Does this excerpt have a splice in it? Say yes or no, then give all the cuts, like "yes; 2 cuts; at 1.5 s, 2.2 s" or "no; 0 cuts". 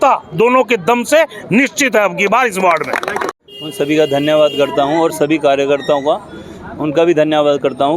no; 0 cuts